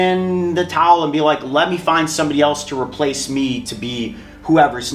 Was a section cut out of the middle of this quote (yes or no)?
no